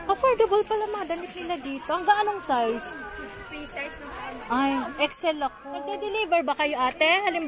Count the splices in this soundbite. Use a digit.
1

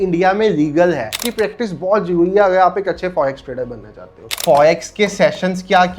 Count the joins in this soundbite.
2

